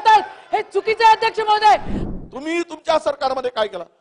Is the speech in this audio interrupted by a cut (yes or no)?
yes